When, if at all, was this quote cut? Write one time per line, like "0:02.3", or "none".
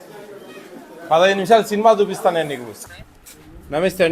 0:02.7

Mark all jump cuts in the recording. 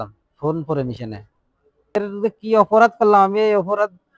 0:02.0

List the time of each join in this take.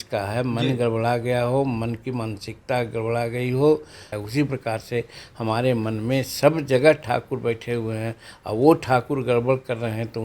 0:04.1

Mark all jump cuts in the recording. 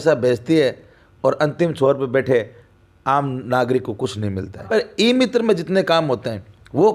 0:04.7

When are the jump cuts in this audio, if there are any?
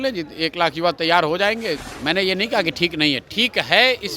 0:01.9

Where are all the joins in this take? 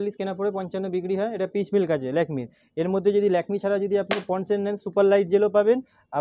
none

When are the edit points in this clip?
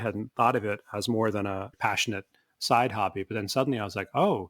0:01.7

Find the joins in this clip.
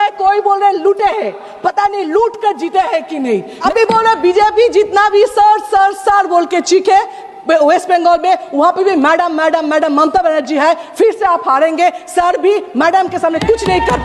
0:03.6

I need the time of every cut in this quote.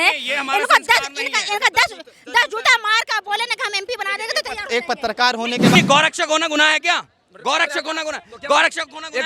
0:05.8

